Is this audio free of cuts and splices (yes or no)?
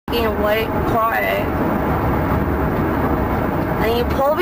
yes